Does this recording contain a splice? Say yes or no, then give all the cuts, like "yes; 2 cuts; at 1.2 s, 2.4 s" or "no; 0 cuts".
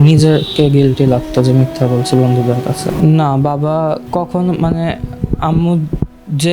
yes; 2 cuts; at 2.8 s, 4.0 s